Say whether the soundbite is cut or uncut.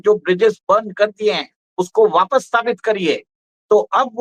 uncut